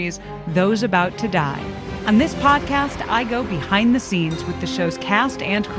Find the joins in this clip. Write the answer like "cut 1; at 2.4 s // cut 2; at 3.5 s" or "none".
cut 1; at 1.9 s